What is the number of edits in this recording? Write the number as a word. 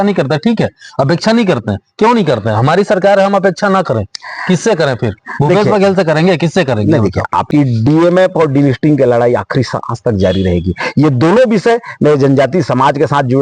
one